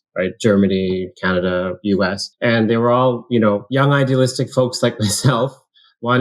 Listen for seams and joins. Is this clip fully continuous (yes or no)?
no